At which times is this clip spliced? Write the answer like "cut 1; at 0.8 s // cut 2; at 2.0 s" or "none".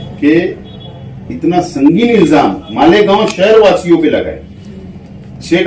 none